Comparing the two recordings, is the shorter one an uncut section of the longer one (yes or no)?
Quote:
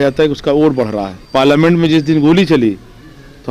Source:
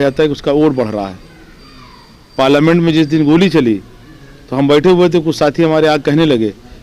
no